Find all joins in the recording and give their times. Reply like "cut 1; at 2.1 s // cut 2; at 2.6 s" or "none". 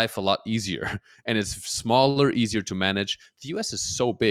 none